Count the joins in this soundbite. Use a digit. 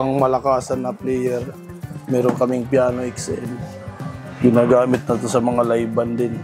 1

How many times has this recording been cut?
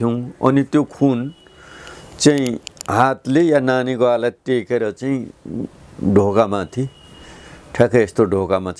0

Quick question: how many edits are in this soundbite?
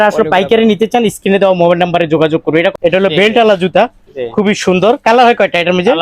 1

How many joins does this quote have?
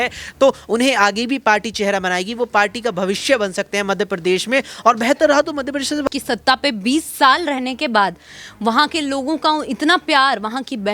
1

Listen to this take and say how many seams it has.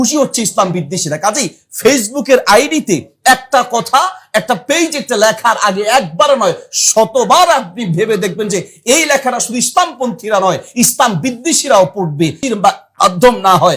1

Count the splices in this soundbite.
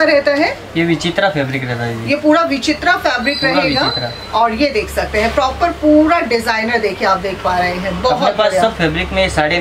0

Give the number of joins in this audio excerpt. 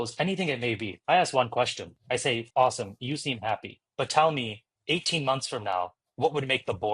2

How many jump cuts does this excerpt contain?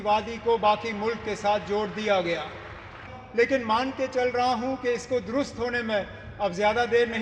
1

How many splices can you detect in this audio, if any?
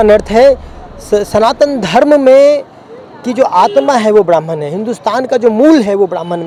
0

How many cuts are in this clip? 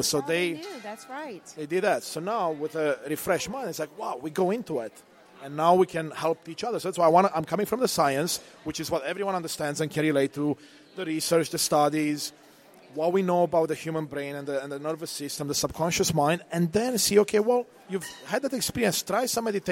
1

